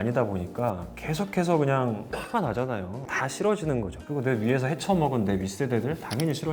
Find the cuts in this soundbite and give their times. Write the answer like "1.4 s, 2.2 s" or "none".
none